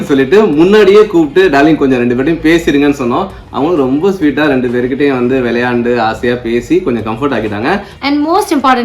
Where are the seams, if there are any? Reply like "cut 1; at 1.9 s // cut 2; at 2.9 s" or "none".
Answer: cut 1; at 7.9 s